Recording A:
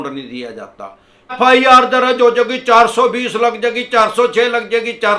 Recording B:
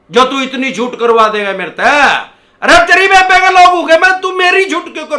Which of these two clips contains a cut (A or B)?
A